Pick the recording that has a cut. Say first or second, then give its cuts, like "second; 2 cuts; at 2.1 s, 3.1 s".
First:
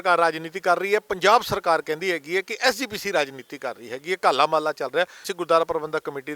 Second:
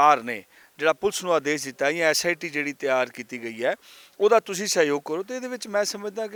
first; 1 cut; at 5.3 s